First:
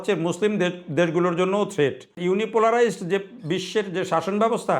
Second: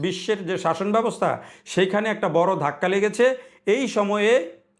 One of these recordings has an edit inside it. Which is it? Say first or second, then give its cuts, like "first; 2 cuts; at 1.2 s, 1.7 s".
first; 1 cut; at 2.2 s